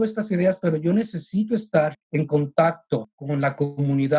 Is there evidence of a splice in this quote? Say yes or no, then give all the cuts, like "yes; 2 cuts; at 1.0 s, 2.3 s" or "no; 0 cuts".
yes; 2 cuts; at 2.0 s, 3.2 s